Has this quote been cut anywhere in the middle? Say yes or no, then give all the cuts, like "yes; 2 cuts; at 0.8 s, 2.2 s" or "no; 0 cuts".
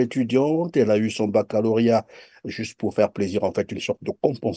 no; 0 cuts